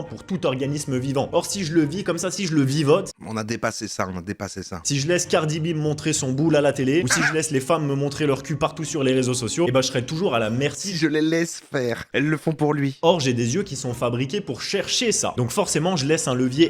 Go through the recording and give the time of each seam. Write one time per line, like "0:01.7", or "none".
none

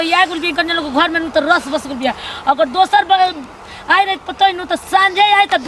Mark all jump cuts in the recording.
none

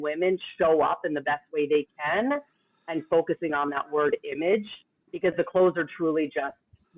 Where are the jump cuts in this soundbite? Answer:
none

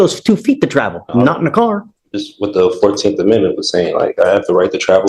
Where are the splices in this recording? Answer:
none

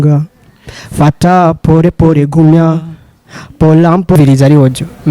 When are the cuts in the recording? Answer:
0:04.2

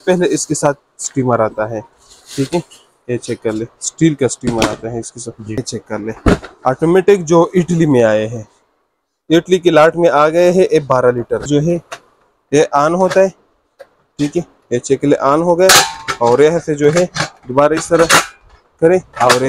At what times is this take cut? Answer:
0:05.6
0:11.5

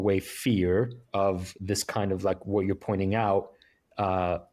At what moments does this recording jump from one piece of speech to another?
none

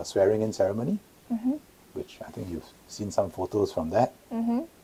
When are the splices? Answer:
none

